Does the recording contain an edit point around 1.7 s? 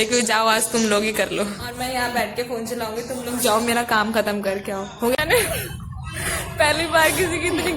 yes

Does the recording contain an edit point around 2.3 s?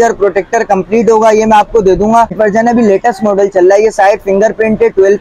yes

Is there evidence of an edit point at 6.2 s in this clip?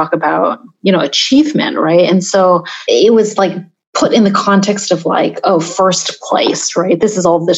no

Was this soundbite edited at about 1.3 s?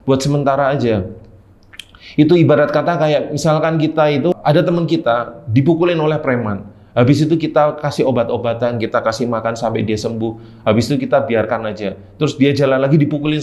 no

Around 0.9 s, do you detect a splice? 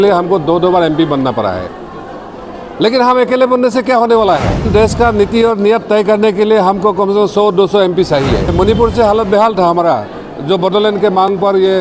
no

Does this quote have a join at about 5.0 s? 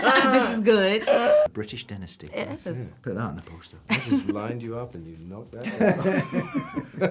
no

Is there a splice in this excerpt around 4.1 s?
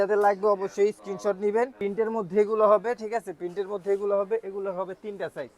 no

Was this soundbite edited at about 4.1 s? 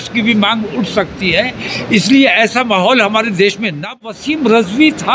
yes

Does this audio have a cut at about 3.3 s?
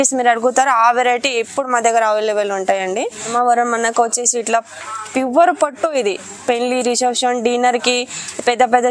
yes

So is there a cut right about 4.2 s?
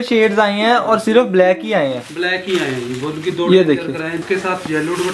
yes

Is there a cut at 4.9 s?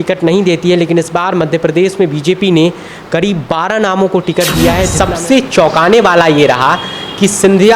yes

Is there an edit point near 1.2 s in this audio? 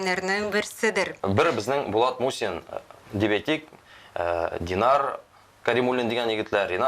yes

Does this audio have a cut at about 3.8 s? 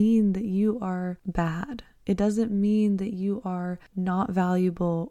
yes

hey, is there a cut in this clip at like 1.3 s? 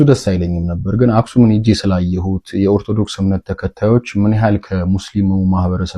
no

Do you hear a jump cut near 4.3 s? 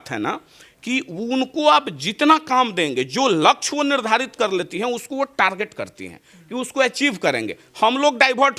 no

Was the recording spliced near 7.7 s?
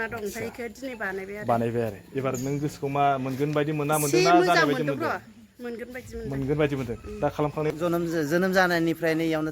yes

